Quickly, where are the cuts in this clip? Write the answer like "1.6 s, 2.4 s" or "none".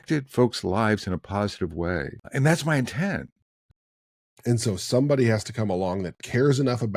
2.2 s, 3.8 s